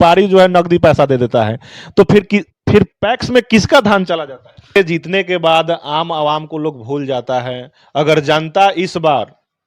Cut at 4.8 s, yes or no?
yes